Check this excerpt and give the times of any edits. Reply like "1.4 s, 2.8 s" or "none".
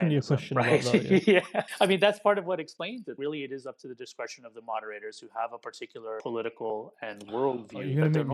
1.6 s, 3.2 s, 6.7 s